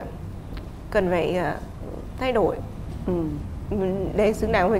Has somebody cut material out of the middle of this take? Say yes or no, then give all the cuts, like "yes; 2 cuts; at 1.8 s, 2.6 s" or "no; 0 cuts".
no; 0 cuts